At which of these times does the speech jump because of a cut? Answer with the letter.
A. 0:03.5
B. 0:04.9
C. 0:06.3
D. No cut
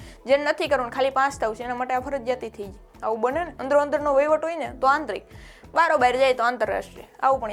A